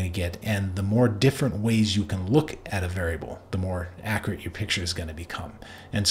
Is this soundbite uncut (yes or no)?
yes